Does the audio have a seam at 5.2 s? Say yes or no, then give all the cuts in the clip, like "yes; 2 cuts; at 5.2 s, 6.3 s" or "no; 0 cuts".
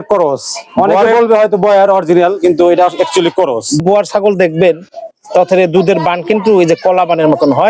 no; 1 cut; at 3.8 s